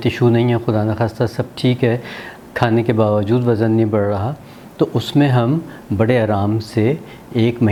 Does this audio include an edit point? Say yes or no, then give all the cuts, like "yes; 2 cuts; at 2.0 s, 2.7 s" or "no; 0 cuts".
no; 0 cuts